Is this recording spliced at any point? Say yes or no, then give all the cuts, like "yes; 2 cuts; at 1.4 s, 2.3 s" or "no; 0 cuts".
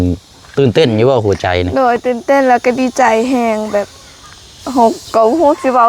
no; 0 cuts